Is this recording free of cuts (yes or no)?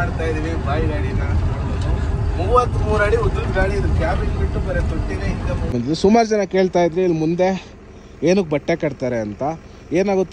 no